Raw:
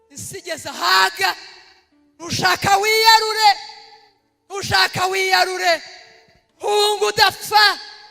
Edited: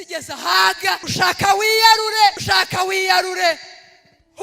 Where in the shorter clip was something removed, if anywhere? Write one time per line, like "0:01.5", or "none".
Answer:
0:01.1
0:02.4